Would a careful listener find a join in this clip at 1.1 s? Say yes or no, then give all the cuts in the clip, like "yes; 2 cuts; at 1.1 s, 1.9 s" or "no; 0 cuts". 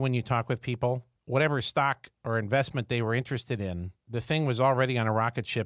yes; 3 cuts; at 1.1 s, 2.1 s, 3.9 s